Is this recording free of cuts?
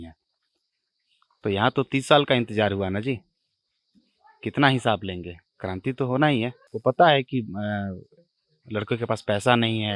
no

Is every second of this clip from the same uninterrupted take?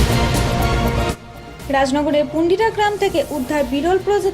yes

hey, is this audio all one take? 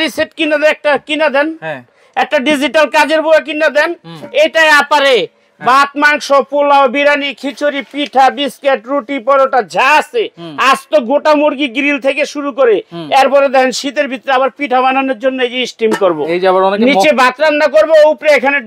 yes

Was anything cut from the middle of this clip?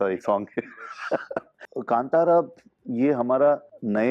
yes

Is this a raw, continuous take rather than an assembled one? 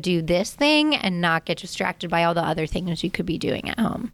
yes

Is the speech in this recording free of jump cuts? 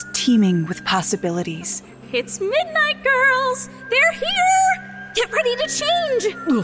yes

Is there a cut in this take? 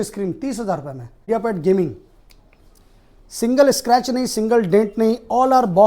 yes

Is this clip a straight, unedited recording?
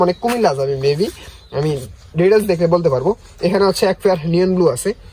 yes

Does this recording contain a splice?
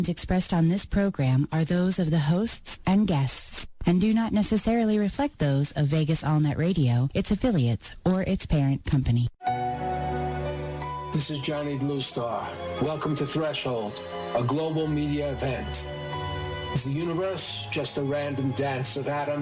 yes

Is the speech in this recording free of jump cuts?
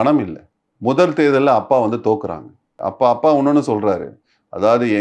no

